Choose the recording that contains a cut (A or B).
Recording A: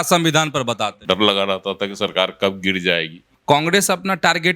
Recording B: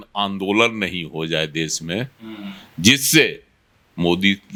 A